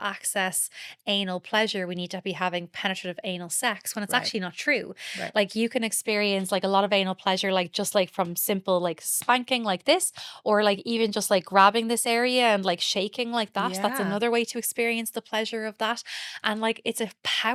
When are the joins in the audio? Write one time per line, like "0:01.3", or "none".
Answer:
none